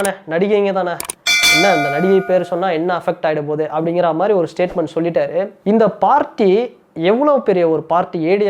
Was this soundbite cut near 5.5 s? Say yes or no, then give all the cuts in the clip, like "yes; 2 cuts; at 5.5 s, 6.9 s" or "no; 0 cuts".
yes; 1 cut; at 5.5 s